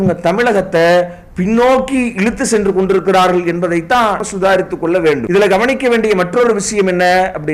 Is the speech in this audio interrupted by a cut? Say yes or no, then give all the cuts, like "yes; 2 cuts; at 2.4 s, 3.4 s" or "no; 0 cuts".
yes; 2 cuts; at 4.2 s, 5.2 s